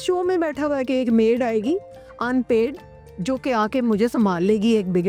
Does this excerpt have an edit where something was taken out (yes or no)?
no